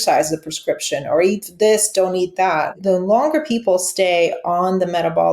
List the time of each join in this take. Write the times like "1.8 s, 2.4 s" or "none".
2.7 s